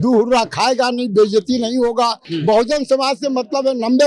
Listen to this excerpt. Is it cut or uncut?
cut